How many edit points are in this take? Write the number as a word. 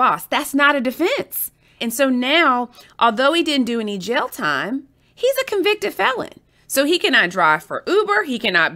one